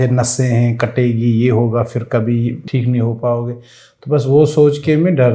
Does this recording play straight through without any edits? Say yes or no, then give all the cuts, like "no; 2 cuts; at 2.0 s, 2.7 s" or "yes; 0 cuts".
no; 1 cut; at 2.6 s